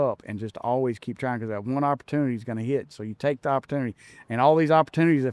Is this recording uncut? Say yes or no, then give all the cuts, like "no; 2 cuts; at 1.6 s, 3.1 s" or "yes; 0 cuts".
yes; 0 cuts